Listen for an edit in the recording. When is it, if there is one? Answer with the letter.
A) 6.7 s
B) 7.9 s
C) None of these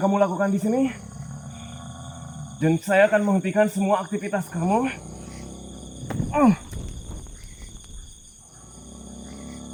C